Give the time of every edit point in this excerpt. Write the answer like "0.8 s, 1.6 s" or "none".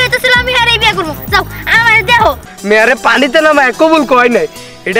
2.5 s